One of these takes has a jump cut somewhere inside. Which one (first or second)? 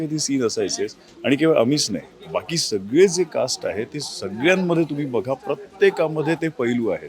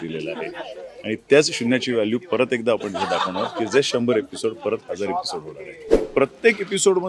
second